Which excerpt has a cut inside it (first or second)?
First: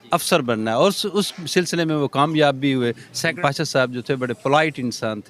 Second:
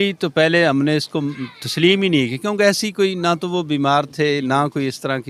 first